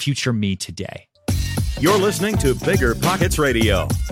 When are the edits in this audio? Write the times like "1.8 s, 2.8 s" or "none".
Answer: 1.1 s